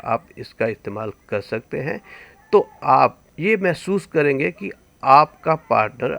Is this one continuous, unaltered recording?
yes; 0 cuts

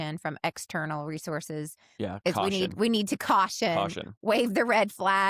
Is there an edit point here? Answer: no; 0 cuts

